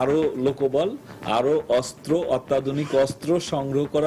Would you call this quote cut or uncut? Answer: uncut